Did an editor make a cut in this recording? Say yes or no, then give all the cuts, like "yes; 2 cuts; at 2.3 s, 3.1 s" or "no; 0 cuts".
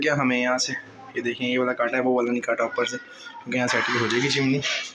no; 0 cuts